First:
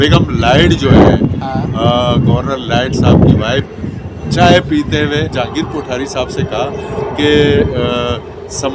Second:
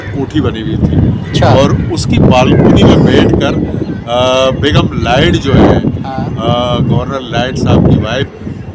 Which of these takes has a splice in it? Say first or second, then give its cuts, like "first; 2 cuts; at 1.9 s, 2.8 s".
first; 1 cut; at 5.3 s